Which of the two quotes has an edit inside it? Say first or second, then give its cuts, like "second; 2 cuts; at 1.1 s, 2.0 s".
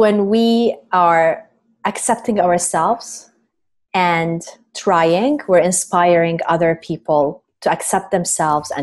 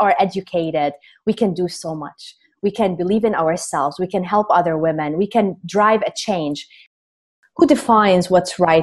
second; 1 cut; at 6.9 s